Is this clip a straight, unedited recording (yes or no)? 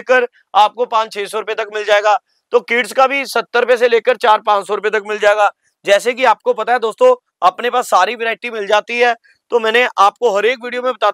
no